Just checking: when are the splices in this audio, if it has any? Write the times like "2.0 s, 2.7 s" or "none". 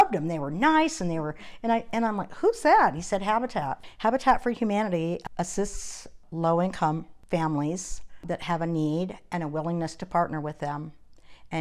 3.8 s, 5.2 s, 6.2 s, 7.1 s, 8.2 s